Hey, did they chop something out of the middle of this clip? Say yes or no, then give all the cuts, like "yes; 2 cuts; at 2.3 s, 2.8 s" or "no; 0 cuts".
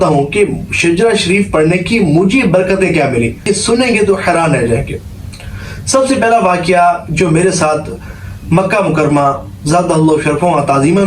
yes; 1 cut; at 3.5 s